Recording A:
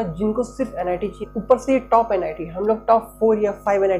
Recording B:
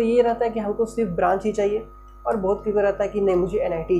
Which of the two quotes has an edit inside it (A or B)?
A